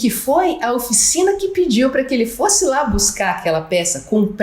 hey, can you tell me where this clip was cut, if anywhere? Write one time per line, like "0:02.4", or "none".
none

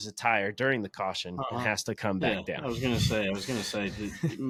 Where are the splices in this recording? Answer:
none

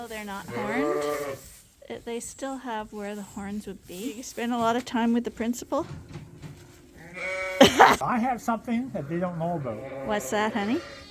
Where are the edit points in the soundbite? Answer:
0:04.3
0:08.0

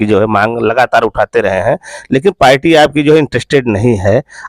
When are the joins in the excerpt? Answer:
none

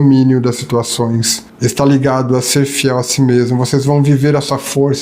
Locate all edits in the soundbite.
0:01.4

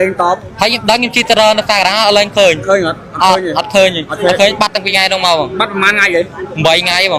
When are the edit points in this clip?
none

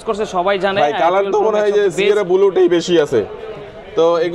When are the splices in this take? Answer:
none

